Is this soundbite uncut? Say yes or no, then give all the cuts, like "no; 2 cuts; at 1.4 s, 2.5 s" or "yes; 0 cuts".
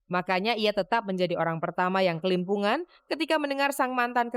yes; 0 cuts